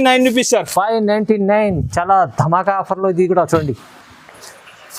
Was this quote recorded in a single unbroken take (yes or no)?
yes